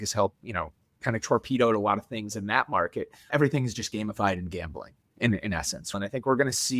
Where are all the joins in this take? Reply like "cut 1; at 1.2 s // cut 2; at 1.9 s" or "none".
cut 1; at 3.3 s // cut 2; at 5.9 s